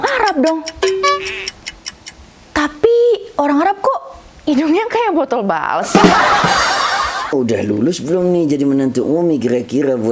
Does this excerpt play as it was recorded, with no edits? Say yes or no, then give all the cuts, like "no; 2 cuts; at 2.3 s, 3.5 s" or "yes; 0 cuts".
no; 1 cut; at 7.3 s